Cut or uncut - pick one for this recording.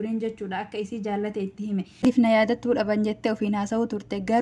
cut